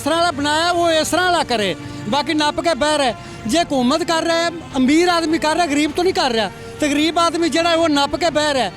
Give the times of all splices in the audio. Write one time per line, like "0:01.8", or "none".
none

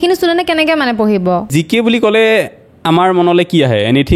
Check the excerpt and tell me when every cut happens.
0:01.5

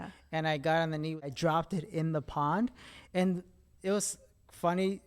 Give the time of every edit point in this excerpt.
0:01.3

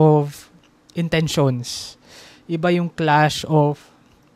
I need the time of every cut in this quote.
none

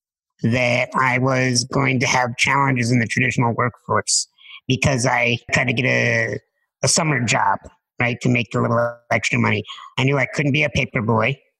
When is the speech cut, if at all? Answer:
0:05.5

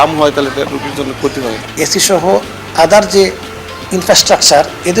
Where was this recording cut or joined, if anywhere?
0:01.6

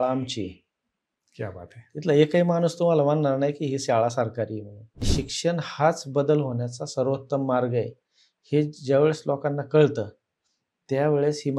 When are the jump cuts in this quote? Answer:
0:05.1

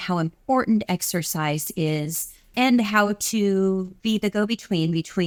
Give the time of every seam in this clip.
none

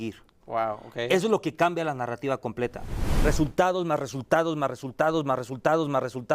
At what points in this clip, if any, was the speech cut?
0:03.1

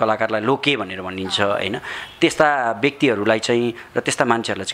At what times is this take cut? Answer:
none

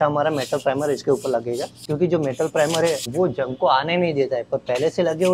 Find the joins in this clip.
0:01.7
0:03.1

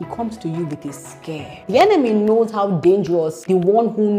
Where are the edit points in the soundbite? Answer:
0:01.5
0:03.4

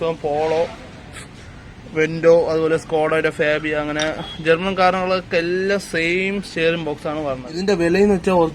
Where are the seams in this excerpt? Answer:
0:07.6

